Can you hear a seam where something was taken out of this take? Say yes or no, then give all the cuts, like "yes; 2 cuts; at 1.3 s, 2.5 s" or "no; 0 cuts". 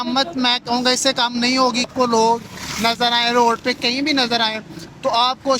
yes; 1 cut; at 1.9 s